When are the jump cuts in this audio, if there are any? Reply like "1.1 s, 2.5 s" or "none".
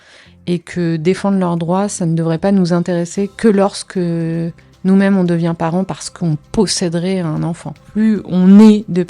7.8 s